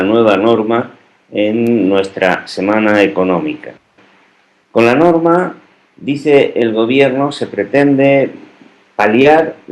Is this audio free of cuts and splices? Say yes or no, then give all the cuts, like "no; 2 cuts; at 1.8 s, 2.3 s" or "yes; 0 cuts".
no; 1 cut; at 8.8 s